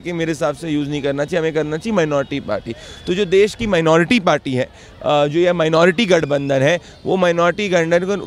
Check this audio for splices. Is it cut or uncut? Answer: uncut